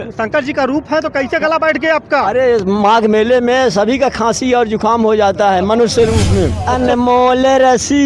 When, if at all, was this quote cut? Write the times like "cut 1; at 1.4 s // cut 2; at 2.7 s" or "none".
cut 1; at 6.6 s